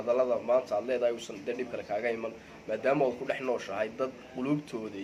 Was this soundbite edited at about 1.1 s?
no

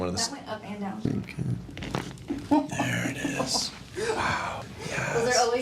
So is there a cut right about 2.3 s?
no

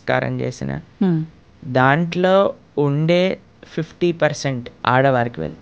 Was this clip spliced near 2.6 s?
no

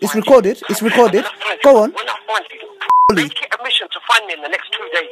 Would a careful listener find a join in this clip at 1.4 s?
no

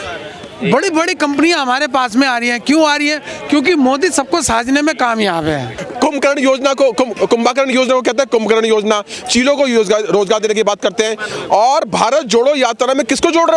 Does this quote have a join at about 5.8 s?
yes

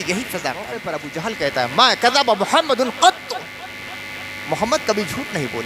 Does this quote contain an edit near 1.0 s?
yes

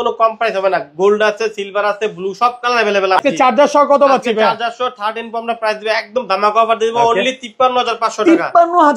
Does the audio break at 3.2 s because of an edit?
yes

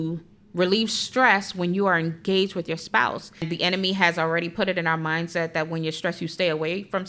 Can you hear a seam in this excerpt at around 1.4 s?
no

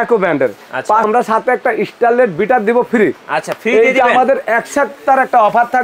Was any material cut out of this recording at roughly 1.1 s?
yes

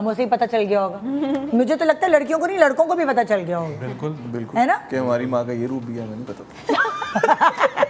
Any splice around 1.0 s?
no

